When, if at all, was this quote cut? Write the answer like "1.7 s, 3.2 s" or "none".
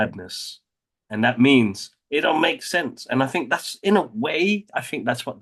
none